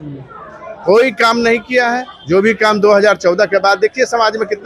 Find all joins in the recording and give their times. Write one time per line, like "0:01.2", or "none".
none